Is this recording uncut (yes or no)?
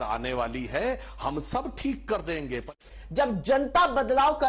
no